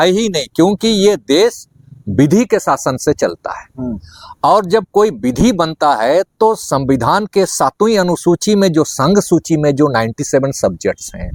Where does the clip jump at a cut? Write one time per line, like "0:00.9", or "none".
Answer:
none